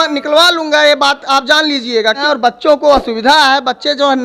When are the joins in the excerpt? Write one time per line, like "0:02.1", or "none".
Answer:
0:02.2